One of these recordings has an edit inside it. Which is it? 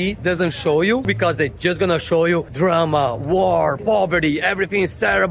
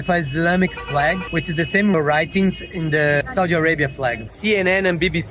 second; 2 cuts; at 3.2 s, 4.3 s

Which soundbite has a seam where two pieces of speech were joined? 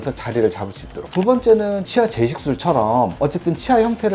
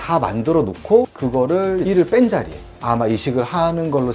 first; 1 cut; at 1.1 s

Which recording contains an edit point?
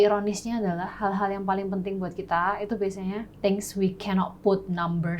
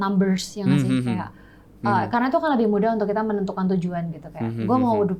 first; 1 cut; at 3.3 s

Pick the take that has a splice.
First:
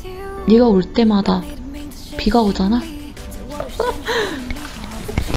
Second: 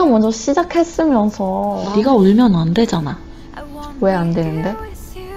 second; 1 cut; at 1.8 s

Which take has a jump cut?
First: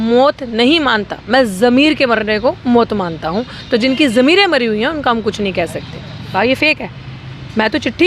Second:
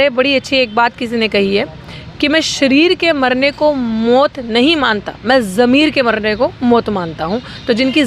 first; 1 cut; at 6.3 s

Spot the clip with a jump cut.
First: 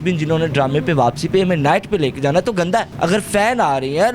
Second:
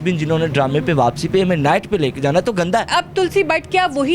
second; 1 cut; at 2.9 s

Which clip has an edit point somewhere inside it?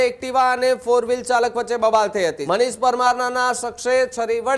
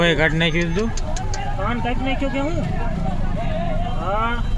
first; 1 cut; at 2.4 s

